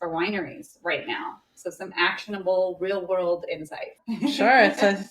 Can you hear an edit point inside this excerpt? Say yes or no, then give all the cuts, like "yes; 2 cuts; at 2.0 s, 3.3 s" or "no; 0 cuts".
yes; 1 cut; at 4.0 s